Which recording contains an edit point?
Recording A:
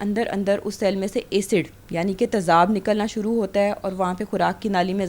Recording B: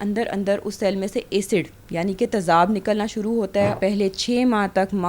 B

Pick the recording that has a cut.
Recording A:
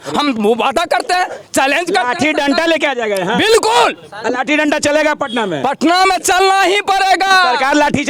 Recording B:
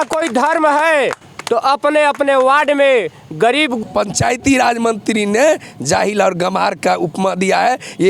B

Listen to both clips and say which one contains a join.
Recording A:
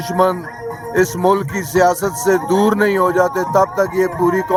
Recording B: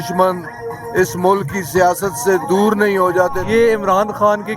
B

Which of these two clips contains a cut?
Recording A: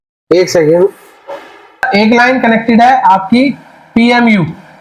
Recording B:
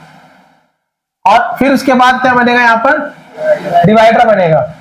A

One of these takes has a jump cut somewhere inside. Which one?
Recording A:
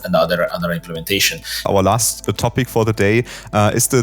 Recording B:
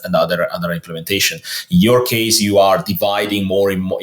A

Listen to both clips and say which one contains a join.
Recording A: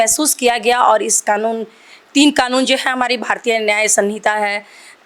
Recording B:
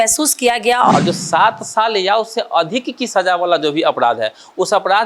B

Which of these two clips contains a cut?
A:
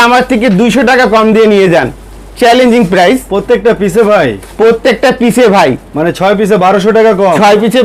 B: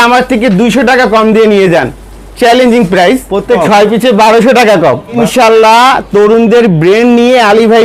B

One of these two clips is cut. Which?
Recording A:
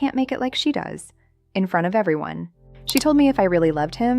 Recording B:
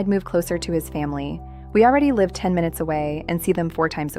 A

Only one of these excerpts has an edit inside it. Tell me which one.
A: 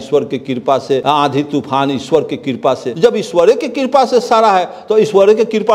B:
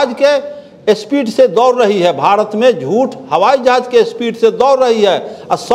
A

